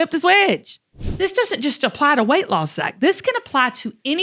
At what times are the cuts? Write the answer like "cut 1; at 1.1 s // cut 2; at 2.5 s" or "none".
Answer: cut 1; at 1.0 s